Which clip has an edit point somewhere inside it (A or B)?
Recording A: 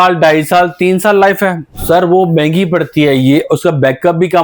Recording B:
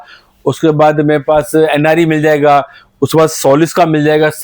A